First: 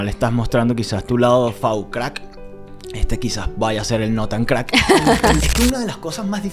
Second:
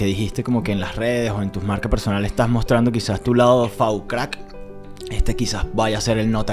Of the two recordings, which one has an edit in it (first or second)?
first